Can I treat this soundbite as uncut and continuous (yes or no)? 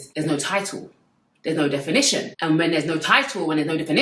yes